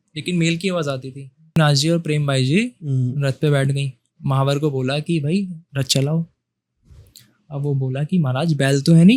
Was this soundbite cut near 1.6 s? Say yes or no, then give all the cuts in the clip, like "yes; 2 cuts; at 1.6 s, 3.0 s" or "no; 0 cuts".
yes; 1 cut; at 1.6 s